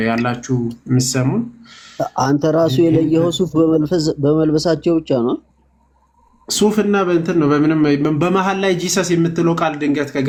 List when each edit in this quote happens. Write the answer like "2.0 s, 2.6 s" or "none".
none